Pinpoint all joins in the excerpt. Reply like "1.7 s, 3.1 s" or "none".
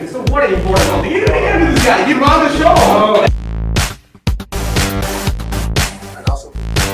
none

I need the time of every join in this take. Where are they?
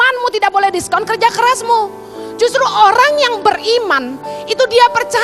none

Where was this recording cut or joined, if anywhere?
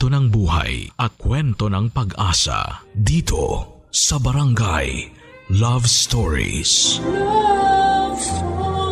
none

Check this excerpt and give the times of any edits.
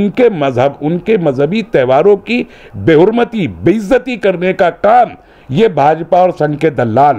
none

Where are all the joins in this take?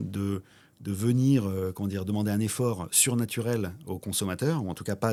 none

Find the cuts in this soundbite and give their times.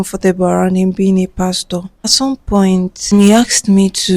2.1 s, 3.1 s

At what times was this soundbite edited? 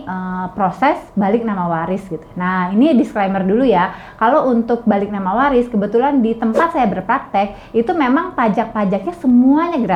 none

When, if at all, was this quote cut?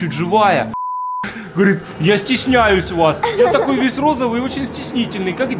1.1 s

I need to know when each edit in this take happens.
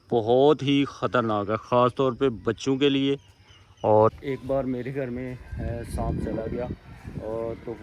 4.1 s

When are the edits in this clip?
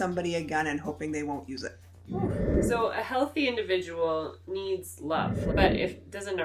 2.5 s, 5.4 s

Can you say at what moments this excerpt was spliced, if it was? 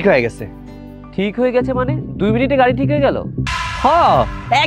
3.4 s

